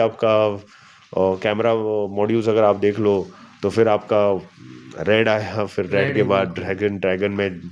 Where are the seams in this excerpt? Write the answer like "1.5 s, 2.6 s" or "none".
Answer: none

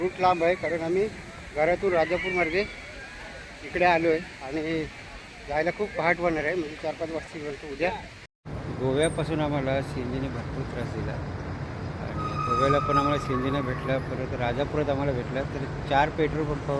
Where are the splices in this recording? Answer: 8.3 s

